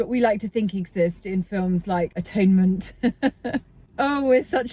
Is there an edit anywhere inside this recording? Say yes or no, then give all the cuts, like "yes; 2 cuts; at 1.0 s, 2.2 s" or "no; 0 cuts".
yes; 1 cut; at 2.2 s